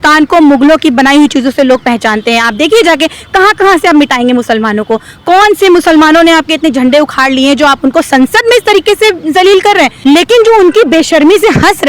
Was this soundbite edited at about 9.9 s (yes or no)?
yes